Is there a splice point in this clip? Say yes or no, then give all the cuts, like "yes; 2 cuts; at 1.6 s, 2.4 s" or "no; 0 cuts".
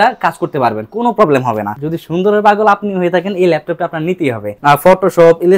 yes; 2 cuts; at 1.7 s, 4.5 s